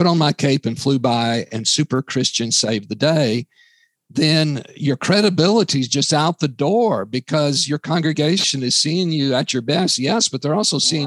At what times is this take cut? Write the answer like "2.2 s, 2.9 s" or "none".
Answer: none